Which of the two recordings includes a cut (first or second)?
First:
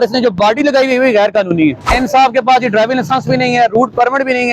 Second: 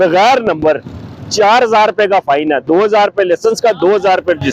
first